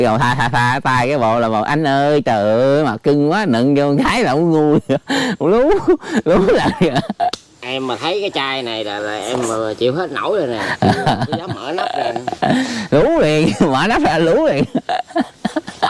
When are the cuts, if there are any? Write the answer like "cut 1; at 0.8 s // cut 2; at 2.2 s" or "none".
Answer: none